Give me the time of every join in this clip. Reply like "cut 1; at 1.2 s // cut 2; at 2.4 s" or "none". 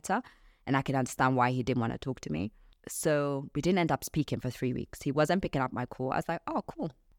none